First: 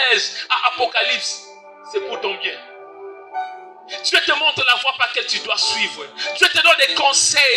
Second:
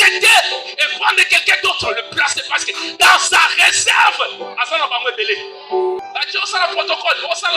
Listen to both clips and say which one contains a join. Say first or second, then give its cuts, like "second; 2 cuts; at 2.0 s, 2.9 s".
second; 1 cut; at 6.0 s